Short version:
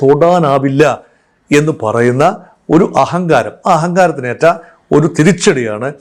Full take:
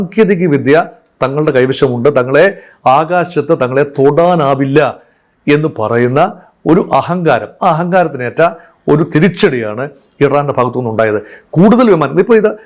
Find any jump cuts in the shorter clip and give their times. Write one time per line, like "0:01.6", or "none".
none